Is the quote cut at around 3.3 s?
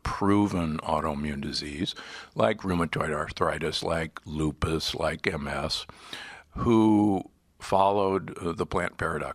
yes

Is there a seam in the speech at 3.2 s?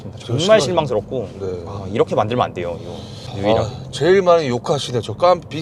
yes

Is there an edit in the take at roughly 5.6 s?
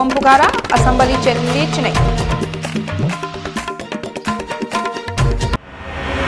yes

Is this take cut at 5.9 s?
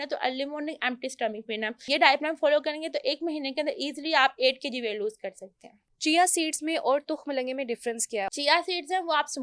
yes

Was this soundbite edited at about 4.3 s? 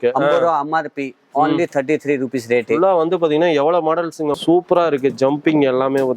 yes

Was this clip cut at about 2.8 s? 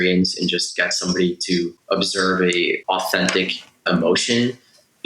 yes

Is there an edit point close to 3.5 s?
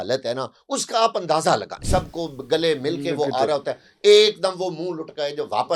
no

